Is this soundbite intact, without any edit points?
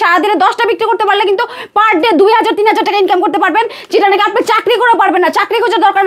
yes; 0 cuts

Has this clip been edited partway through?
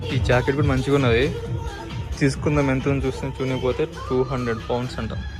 no; 0 cuts

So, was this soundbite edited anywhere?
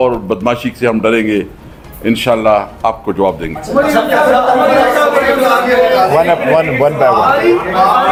no; 0 cuts

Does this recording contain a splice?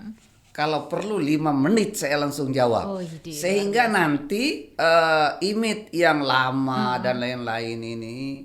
yes; 1 cut; at 4.6 s

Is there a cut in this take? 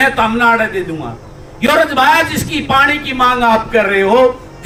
no; 0 cuts

